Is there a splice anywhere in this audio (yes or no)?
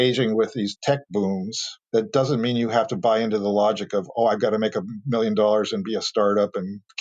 no